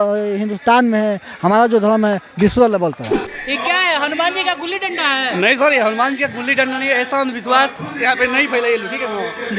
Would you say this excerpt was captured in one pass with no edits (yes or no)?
no